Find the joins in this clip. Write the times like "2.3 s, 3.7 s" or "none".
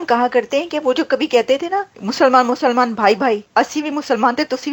2.0 s, 3.4 s